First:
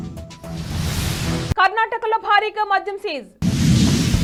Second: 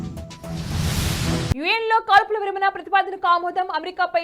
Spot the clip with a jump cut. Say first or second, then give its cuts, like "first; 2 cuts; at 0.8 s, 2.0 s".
second; 1 cut; at 1.5 s